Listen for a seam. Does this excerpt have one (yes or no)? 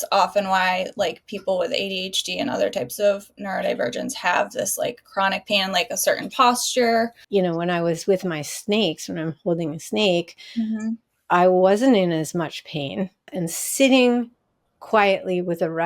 yes